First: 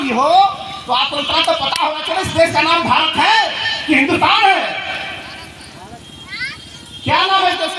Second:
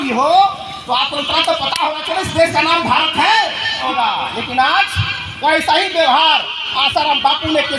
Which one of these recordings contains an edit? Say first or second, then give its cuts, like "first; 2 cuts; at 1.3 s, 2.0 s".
second; 1 cut; at 3.9 s